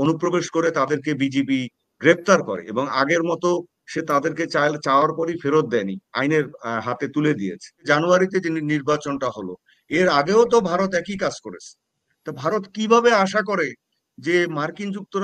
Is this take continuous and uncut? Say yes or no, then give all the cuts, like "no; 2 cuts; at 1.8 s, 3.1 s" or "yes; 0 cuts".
no; 1 cut; at 7.8 s